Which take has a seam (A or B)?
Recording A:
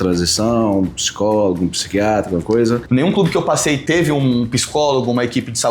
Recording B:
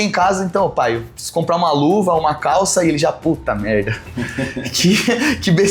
A